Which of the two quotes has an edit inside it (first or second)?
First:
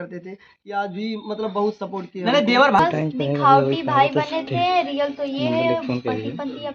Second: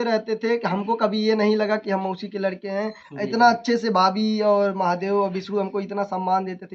first